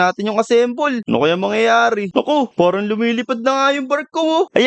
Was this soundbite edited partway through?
no; 0 cuts

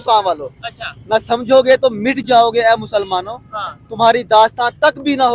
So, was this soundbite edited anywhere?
no; 0 cuts

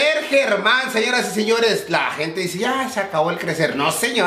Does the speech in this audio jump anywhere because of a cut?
no; 0 cuts

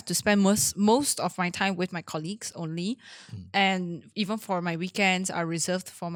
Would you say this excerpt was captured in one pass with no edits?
yes; 0 cuts

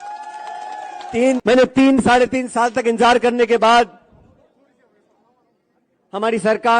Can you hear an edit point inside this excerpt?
yes; 1 cut; at 1.4 s

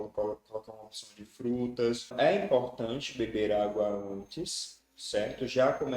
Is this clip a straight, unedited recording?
no; 1 cut; at 2.1 s

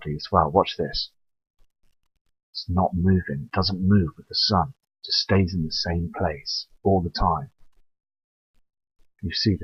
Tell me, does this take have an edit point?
no; 0 cuts

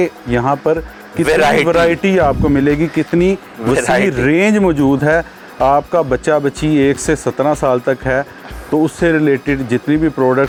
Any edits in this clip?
no; 0 cuts

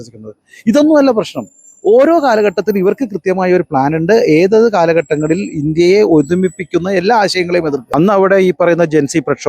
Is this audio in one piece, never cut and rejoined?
no; 1 cut; at 7.9 s

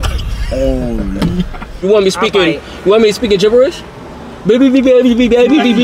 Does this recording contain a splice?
yes; 1 cut; at 1.8 s

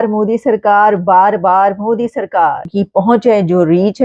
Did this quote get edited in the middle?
no; 0 cuts

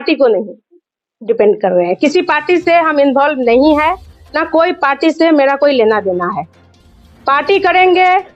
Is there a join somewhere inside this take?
no; 0 cuts

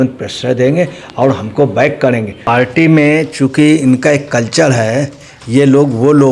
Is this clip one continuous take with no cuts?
no; 1 cut; at 2.3 s

